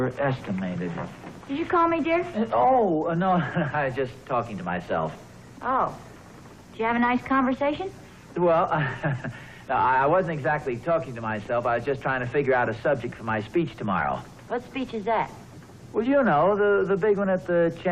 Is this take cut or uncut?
cut